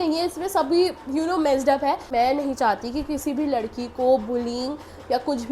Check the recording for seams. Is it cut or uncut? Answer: cut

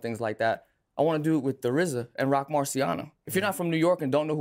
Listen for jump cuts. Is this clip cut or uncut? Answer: uncut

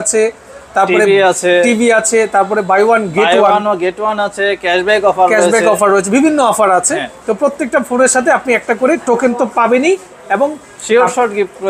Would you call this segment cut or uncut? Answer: uncut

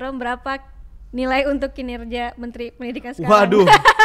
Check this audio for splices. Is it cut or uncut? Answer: uncut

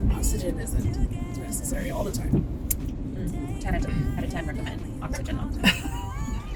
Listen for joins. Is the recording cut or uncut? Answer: uncut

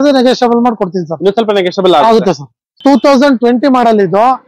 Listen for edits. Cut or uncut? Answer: cut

